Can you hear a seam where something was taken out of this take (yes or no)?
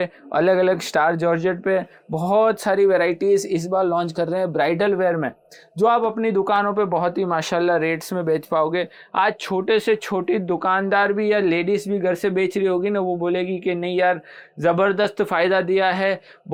no